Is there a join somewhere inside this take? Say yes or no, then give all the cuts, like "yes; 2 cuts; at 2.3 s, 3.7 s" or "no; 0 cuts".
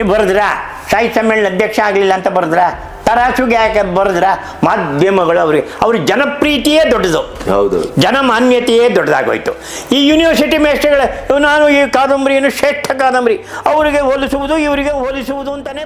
no; 0 cuts